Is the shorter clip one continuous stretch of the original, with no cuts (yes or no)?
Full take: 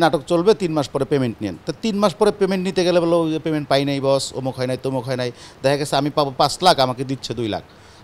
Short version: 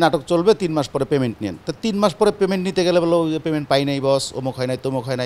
yes